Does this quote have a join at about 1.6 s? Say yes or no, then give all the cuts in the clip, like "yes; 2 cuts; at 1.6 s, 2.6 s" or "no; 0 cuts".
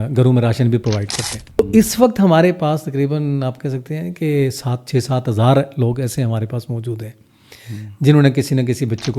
yes; 1 cut; at 1.6 s